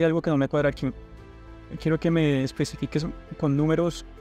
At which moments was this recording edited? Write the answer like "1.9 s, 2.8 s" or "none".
none